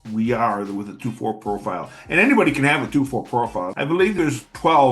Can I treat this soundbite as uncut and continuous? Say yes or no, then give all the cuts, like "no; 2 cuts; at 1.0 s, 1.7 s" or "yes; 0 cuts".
no; 1 cut; at 4.0 s